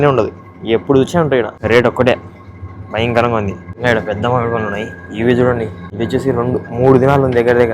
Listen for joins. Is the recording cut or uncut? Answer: cut